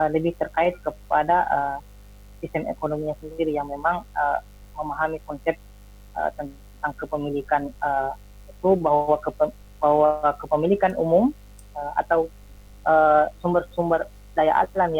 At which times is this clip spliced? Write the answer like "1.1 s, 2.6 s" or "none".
none